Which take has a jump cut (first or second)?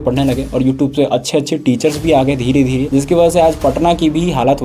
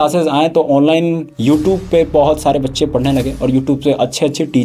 first